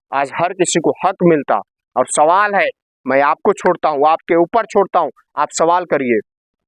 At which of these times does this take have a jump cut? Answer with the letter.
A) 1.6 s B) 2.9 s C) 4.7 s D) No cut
D